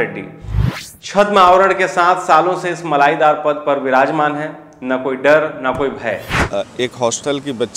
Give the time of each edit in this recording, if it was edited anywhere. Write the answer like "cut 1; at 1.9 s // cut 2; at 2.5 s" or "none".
cut 1; at 6.3 s